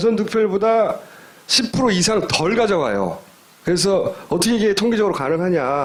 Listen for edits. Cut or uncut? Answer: uncut